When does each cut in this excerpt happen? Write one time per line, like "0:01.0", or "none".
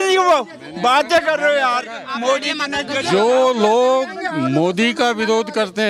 none